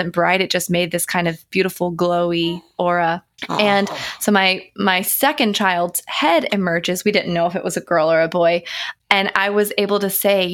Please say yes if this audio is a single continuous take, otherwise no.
no